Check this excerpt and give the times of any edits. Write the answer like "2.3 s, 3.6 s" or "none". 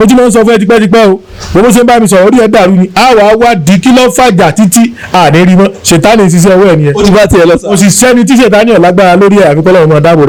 none